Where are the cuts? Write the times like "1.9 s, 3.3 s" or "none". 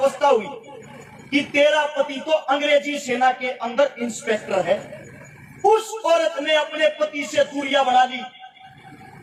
none